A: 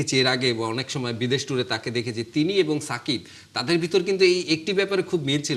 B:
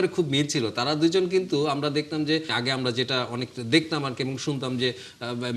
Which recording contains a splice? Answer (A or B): B